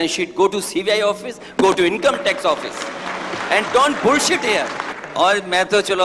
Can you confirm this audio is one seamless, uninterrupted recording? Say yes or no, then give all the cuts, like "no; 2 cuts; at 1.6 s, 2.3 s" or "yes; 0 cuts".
no; 1 cut; at 5.0 s